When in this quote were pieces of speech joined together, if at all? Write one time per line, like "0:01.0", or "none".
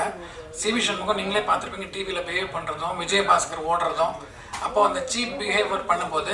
none